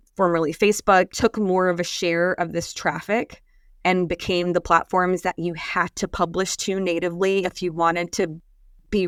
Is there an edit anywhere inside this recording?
no; 0 cuts

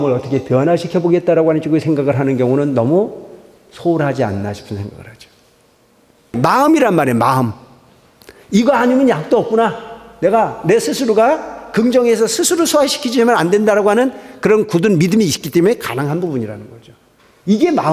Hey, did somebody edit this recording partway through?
yes; 1 cut; at 6.4 s

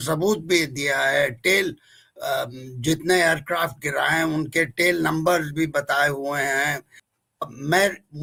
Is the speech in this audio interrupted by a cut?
no; 0 cuts

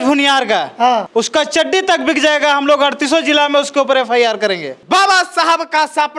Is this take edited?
yes; 2 cuts; at 1.1 s, 4.7 s

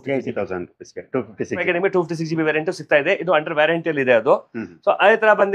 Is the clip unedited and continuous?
no; 1 cut; at 1.6 s

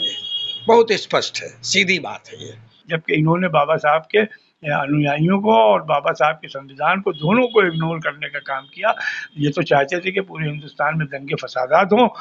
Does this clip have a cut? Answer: yes; 1 cut; at 2.7 s

